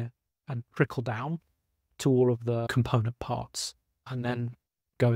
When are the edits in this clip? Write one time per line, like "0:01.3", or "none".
0:02.8
0:04.1